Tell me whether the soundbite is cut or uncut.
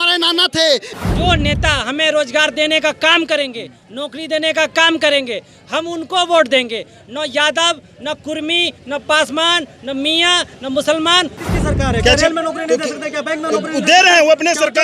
cut